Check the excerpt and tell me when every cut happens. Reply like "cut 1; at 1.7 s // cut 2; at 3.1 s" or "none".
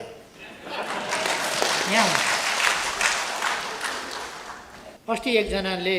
cut 1; at 4.9 s

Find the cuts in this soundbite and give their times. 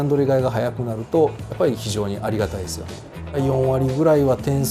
cut 1; at 3.3 s

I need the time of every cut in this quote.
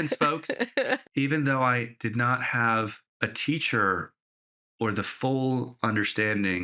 cut 1; at 1.1 s

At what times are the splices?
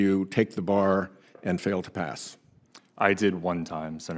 none

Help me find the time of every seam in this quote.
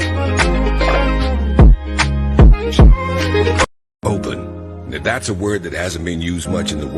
cut 1; at 3.6 s

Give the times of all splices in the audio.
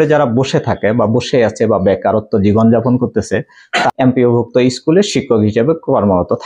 cut 1; at 3.9 s

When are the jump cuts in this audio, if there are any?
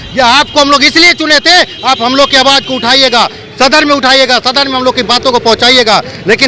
none

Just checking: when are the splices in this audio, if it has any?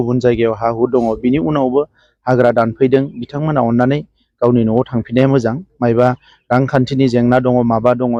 none

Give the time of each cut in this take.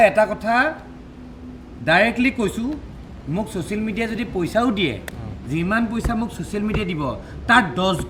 none

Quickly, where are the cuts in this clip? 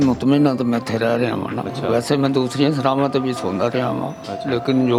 none

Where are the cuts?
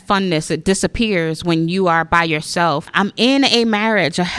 cut 1; at 2.9 s

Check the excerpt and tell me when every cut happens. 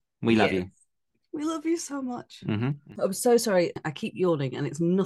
cut 1; at 2.8 s // cut 2; at 3.9 s

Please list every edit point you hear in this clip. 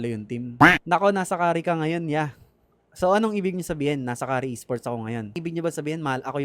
cut 1; at 5.4 s

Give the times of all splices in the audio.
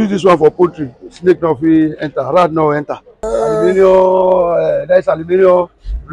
cut 1; at 3.3 s

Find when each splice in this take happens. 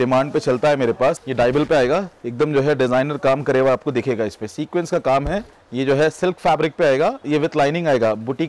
cut 1; at 1.2 s // cut 2; at 5.6 s

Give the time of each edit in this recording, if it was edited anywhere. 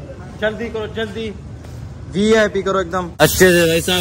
cut 1; at 3.1 s

